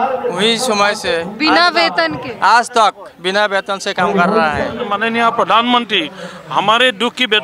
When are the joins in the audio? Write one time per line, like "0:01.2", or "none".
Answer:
0:04.9